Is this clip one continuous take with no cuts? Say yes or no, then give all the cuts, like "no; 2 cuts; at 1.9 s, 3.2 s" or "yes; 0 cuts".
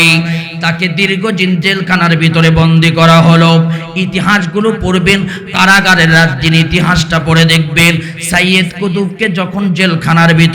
yes; 0 cuts